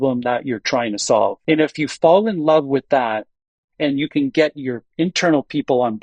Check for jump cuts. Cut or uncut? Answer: cut